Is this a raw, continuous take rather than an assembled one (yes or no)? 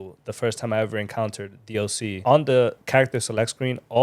no